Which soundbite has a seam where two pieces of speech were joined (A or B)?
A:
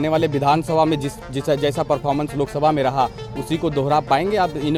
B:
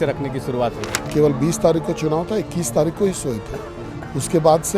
B